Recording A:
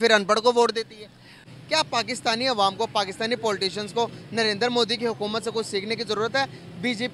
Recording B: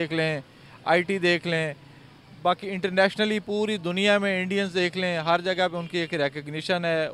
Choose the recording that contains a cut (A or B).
A